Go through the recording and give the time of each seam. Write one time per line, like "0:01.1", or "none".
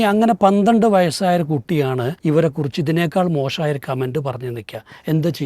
0:02.1